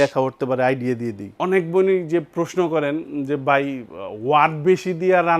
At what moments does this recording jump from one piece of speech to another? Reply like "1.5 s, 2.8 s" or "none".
1.3 s